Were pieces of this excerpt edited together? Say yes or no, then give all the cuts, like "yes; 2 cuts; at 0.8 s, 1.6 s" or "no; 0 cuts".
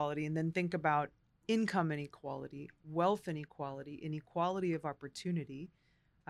yes; 1 cut; at 1.3 s